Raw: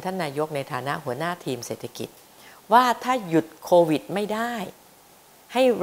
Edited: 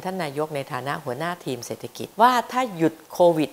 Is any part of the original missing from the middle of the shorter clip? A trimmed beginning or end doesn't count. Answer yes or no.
yes